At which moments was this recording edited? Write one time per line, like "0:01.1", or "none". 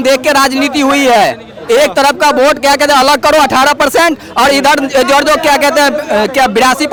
none